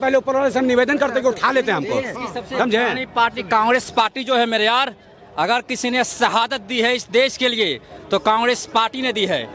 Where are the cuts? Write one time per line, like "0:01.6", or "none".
none